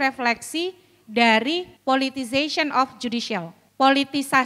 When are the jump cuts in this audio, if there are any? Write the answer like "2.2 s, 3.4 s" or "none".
1.7 s, 3.6 s